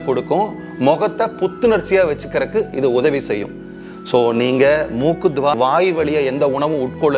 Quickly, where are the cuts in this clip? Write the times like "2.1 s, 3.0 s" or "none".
5.6 s